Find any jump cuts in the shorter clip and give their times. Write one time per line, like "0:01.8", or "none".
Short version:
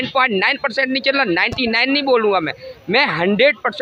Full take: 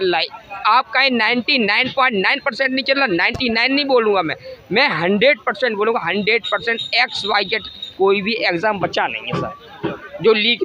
none